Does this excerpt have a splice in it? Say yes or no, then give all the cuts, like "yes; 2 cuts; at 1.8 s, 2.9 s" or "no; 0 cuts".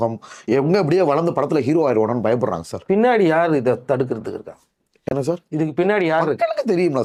no; 0 cuts